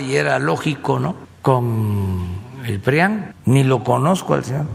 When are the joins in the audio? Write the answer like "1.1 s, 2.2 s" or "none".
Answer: 1.3 s, 3.3 s